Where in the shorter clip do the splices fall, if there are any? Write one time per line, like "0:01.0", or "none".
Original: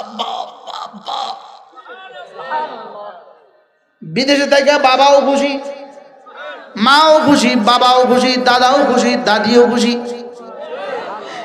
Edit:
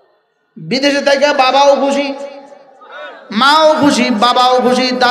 none